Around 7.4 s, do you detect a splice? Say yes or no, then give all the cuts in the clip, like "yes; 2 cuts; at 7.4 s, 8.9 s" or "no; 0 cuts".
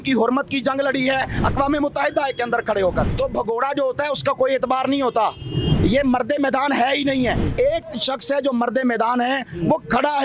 yes; 2 cuts; at 3.1 s, 7.4 s